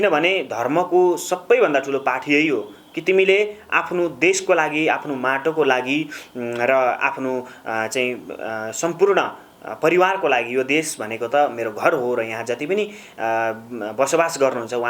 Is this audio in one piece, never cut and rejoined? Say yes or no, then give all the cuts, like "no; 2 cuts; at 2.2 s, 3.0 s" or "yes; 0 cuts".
yes; 0 cuts